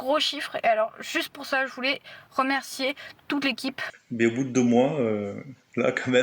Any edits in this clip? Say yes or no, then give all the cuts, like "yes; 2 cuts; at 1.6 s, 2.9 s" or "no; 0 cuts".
yes; 1 cut; at 3.8 s